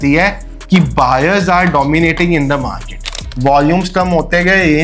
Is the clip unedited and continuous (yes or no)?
no